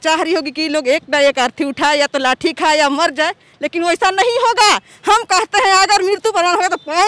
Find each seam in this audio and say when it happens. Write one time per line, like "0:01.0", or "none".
none